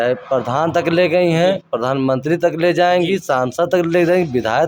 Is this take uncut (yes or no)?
yes